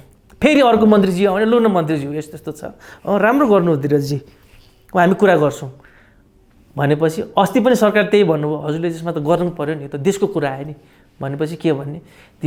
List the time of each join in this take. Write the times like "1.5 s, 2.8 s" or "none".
none